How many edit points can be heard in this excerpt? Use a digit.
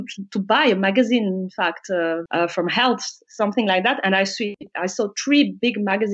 1